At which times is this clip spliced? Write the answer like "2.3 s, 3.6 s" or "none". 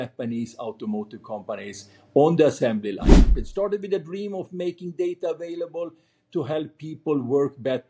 3.4 s

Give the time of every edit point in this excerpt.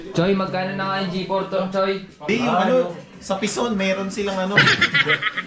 2.2 s

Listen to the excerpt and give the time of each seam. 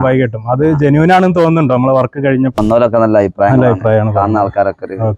2.6 s

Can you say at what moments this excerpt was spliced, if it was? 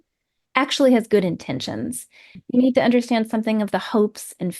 2.2 s

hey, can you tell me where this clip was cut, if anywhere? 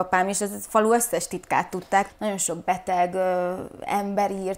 2.1 s

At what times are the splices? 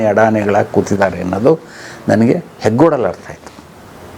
none

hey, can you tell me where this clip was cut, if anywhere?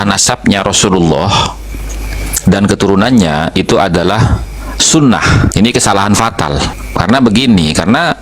5.5 s, 6.8 s

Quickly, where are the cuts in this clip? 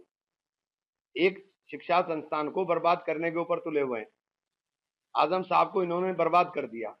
none

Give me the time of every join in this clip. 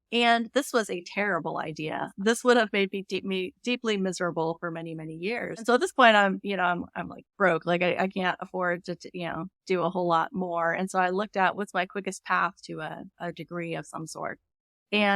2.1 s, 5.6 s, 11.5 s

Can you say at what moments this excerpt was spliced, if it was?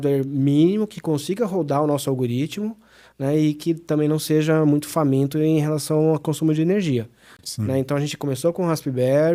none

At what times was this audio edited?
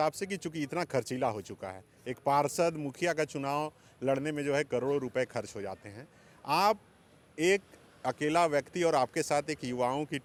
none

